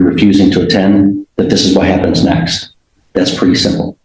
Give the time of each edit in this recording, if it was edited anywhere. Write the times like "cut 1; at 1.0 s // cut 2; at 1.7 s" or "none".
none